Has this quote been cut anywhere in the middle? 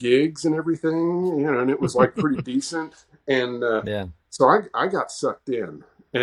no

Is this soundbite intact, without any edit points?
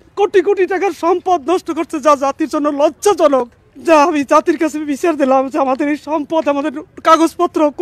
yes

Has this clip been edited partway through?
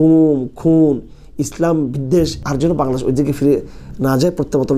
yes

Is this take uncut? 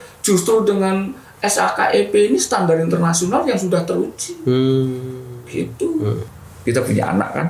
no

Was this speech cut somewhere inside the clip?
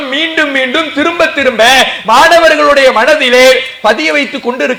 no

